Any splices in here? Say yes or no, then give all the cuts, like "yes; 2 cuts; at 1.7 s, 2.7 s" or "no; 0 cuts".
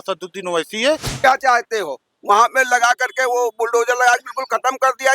yes; 1 cut; at 1.1 s